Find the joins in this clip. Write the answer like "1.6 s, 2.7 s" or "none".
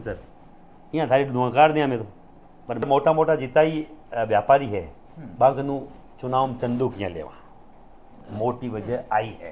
2.9 s